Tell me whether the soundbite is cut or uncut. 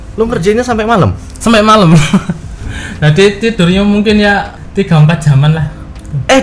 cut